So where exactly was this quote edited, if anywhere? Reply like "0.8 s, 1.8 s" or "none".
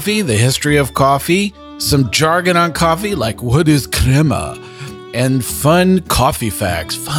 1.7 s